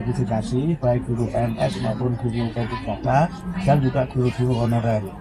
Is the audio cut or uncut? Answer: uncut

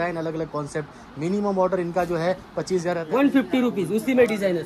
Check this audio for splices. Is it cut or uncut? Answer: cut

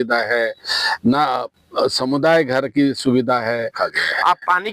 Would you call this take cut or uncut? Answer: cut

